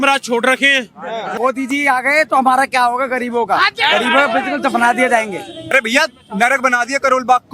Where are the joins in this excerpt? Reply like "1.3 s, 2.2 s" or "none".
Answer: 1.4 s, 5.7 s